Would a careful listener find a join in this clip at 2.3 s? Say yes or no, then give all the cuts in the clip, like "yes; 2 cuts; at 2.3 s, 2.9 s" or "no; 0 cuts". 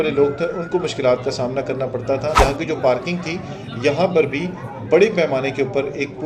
yes; 1 cut; at 2.3 s